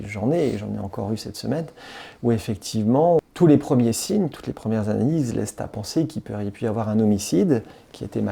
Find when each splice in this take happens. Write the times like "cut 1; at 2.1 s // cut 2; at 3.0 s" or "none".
cut 1; at 3.2 s

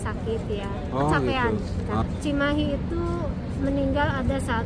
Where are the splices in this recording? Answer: cut 1; at 2.0 s

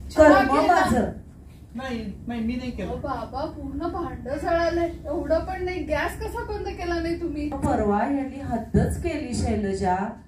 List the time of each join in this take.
cut 1; at 7.6 s

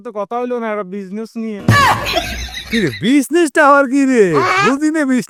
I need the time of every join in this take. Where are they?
none

